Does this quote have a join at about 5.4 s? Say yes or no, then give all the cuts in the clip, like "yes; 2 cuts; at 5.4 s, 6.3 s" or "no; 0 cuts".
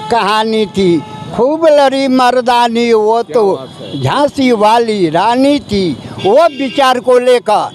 no; 0 cuts